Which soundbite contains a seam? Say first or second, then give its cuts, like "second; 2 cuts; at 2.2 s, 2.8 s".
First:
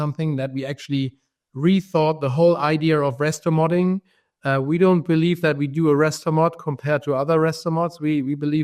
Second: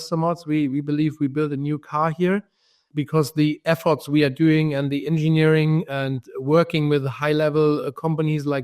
second; 1 cut; at 2.9 s